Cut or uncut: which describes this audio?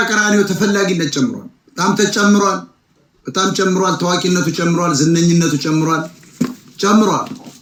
uncut